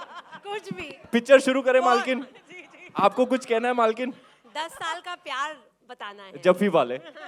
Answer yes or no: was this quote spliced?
no